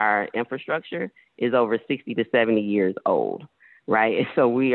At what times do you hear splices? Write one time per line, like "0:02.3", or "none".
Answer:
none